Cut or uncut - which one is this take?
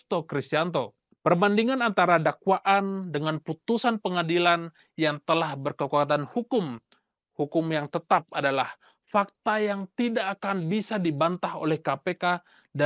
cut